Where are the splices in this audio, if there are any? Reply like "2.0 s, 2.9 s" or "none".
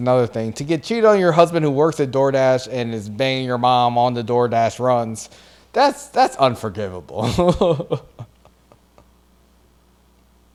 none